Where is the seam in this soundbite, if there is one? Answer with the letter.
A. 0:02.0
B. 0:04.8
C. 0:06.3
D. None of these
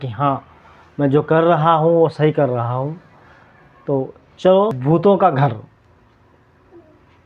B